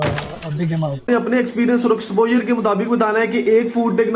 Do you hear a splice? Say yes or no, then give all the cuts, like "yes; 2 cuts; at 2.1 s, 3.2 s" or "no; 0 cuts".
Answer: yes; 1 cut; at 1.0 s